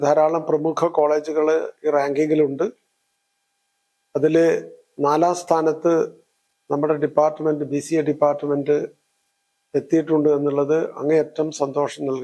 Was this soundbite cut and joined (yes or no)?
no